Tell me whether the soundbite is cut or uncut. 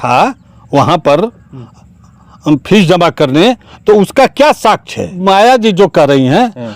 cut